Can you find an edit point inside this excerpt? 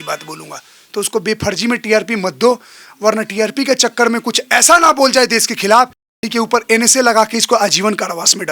yes; 1 cut; at 6.3 s

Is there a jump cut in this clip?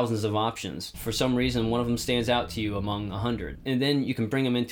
no; 0 cuts

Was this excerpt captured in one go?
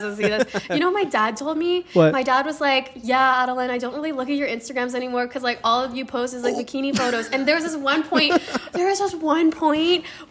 yes; 0 cuts

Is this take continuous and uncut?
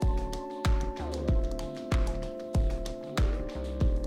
yes; 0 cuts

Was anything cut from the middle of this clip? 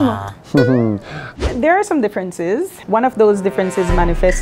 yes; 1 cut; at 1.2 s

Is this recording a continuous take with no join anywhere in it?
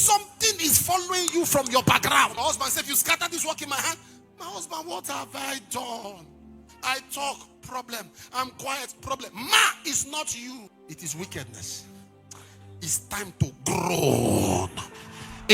no; 2 cuts; at 2.3 s, 10.7 s

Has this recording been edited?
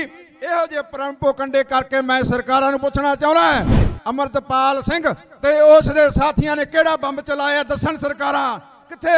no; 0 cuts

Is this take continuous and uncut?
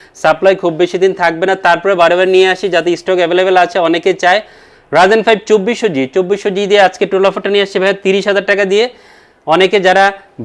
yes; 0 cuts

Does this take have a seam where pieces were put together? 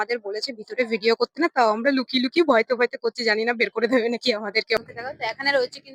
yes; 1 cut; at 4.8 s

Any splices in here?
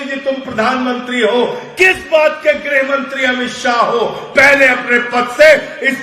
no; 0 cuts

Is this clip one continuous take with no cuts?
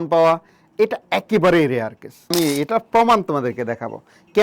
no; 1 cut; at 2.3 s

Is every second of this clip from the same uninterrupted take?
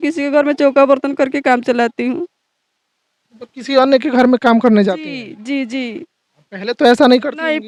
yes; 0 cuts

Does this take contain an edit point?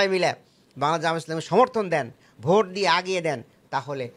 no; 0 cuts

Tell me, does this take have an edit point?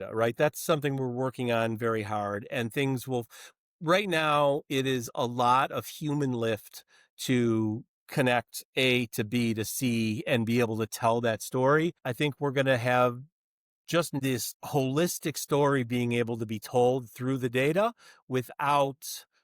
yes; 2 cuts; at 12.0 s, 14.2 s

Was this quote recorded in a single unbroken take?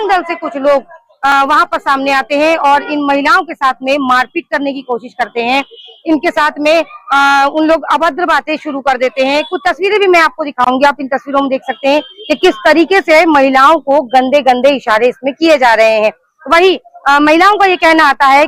yes; 0 cuts

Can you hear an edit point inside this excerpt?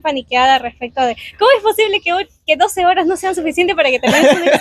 no; 0 cuts

